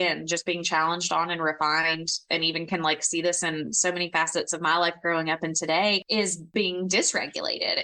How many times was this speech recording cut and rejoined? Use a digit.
1